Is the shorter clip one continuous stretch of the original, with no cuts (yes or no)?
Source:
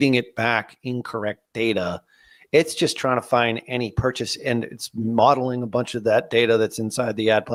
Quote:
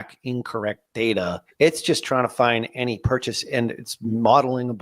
no